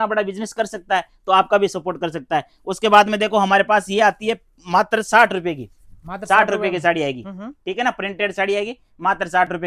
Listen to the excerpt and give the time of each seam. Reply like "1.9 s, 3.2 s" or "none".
none